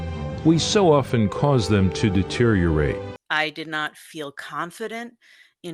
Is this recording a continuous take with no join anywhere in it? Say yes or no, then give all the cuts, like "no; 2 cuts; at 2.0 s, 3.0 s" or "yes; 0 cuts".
no; 1 cut; at 3.1 s